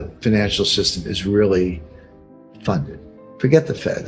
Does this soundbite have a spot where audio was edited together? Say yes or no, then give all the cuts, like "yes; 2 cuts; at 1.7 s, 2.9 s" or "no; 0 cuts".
no; 0 cuts